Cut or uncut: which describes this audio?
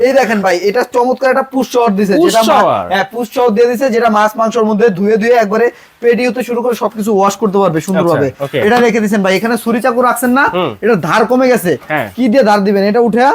uncut